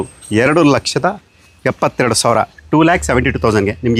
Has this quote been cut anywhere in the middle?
no; 0 cuts

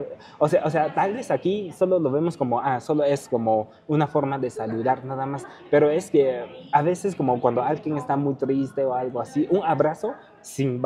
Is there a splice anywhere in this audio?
no; 0 cuts

